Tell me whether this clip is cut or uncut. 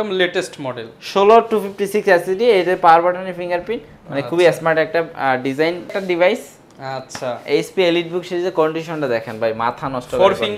cut